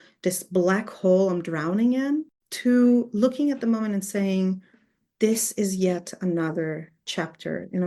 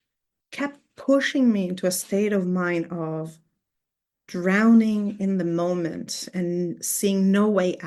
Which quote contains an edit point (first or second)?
first